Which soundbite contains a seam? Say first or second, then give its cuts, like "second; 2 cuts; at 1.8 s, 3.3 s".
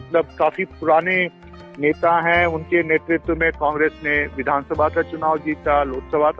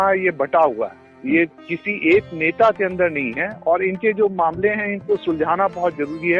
second; 1 cut; at 1.1 s